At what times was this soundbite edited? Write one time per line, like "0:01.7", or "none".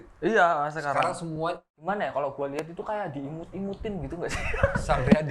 0:01.8